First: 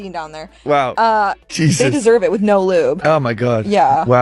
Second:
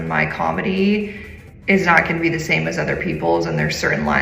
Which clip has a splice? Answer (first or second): first